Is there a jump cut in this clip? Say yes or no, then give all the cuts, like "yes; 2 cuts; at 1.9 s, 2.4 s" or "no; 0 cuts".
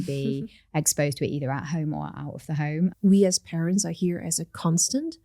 yes; 1 cut; at 3.0 s